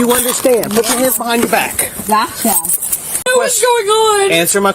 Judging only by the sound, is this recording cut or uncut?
cut